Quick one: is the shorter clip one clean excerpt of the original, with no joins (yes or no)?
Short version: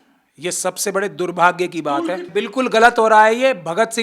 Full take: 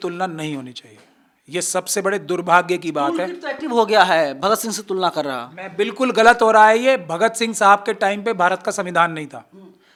no